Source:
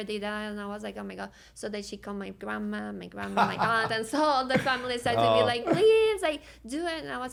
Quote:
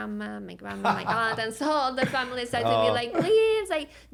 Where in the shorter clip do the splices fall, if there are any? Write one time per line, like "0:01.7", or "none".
none